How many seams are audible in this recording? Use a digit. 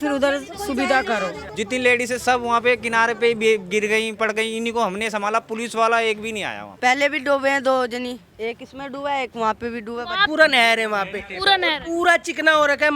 3